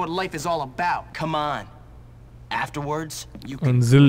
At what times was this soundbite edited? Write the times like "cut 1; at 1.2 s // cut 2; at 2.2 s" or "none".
cut 1; at 1.1 s